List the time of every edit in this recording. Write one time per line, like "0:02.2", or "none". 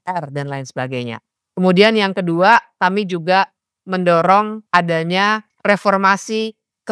0:04.6
0:05.5